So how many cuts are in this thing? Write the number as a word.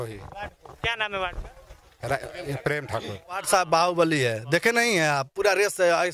one